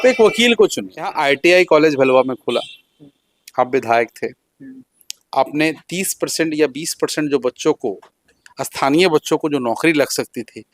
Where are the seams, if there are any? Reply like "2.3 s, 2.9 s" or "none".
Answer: 1.1 s